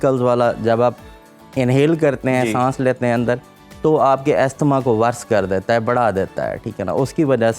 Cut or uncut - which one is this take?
uncut